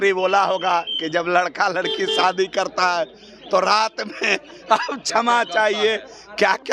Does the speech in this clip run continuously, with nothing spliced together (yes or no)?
yes